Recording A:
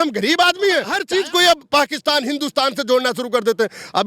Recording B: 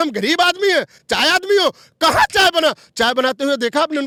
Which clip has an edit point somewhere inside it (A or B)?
A